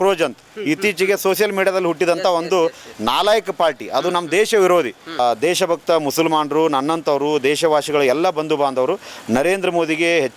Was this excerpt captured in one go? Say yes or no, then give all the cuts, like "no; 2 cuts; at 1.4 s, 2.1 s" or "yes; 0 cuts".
no; 1 cut; at 5.2 s